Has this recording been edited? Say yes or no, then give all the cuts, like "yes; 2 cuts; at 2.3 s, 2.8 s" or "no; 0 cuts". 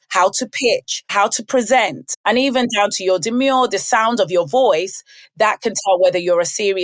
yes; 2 cuts; at 1.1 s, 2.1 s